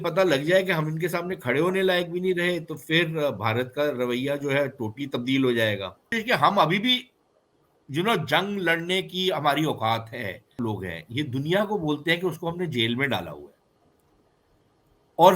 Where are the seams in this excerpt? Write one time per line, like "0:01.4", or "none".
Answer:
0:06.1
0:10.6